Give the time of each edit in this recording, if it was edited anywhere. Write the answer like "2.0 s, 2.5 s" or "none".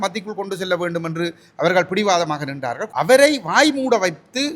2.8 s